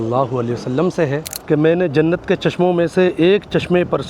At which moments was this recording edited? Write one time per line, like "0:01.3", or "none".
0:01.3